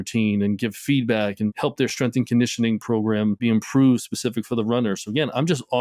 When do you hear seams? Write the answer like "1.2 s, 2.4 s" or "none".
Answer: 1.9 s, 3.4 s